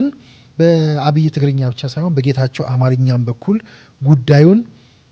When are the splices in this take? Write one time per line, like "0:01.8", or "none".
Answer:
none